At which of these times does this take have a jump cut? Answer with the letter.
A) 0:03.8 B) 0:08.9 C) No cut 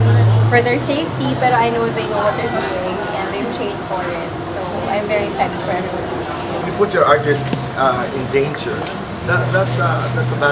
C